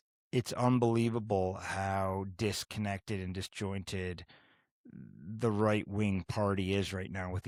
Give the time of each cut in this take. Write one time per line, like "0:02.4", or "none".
none